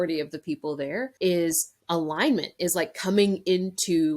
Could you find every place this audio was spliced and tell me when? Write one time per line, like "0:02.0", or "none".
0:01.1
0:01.7